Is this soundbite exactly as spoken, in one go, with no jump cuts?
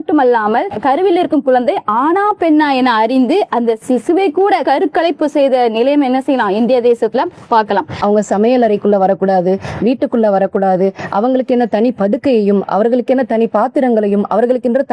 no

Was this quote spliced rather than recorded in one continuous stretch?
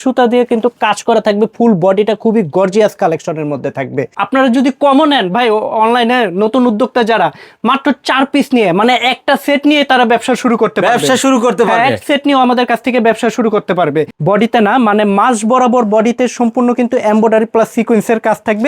yes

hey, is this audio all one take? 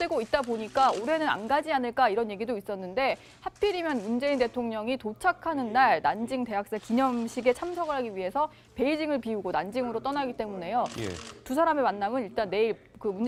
yes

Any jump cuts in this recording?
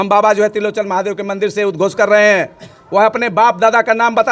no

